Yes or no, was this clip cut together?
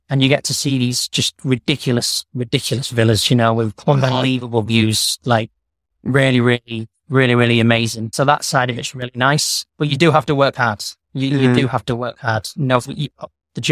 yes